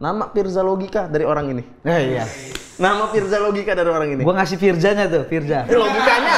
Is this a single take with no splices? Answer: yes; 0 cuts

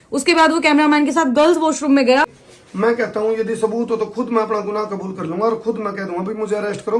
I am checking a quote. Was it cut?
yes; 1 cut; at 2.3 s

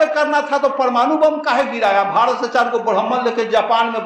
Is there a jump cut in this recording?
no; 0 cuts

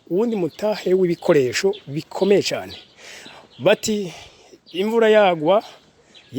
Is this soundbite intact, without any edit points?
yes; 0 cuts

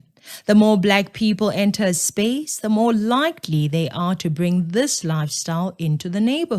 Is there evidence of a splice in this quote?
yes; 1 cut; at 1.0 s

